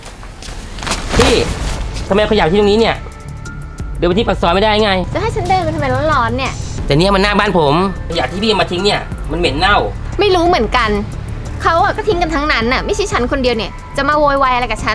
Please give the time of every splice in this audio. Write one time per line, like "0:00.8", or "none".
0:05.1
0:06.6
0:08.0
0:10.0

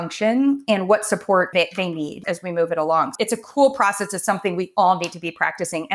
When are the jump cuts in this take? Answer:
0:02.2
0:03.1

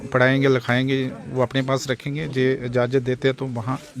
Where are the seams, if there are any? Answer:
none

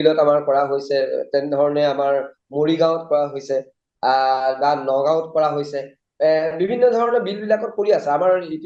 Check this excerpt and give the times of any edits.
none

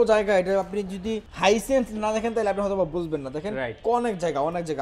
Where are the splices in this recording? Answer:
0:01.3

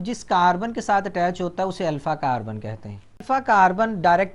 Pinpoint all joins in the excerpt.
0:03.2

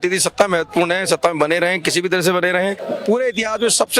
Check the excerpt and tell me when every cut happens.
0:02.8

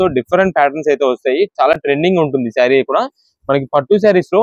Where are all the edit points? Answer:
none

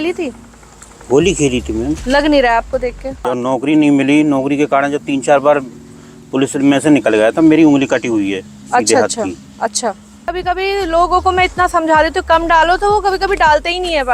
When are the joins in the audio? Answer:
0:03.3
0:10.4

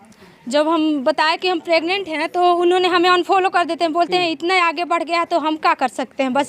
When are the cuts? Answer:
none

